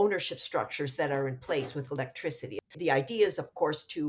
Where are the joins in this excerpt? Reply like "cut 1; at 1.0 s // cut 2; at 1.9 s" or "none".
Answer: none